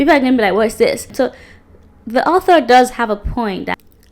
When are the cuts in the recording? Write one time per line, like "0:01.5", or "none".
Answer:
0:01.1